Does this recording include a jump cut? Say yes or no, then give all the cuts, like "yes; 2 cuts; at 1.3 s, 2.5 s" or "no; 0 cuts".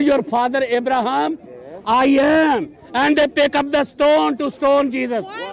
no; 0 cuts